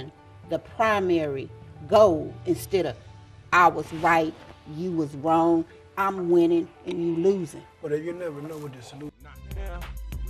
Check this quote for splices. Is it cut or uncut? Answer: cut